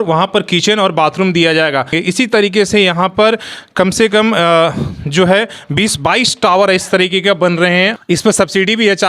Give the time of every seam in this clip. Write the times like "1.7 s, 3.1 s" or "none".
1.9 s, 8.0 s